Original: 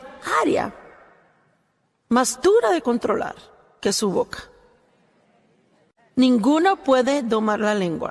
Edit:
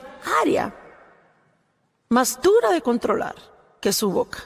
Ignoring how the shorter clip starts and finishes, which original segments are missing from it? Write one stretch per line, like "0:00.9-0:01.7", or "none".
none